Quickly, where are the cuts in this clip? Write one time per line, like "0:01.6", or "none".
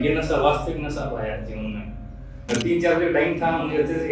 0:02.5